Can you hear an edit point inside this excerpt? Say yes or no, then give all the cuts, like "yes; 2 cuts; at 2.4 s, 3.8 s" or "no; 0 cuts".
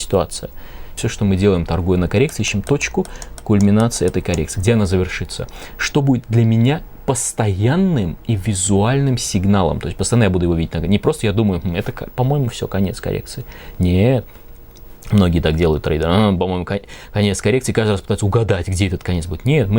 yes; 1 cut; at 1.0 s